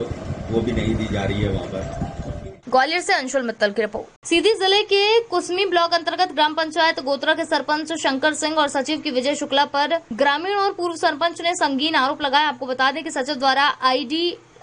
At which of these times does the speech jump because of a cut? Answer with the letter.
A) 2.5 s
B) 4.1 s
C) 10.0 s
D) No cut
B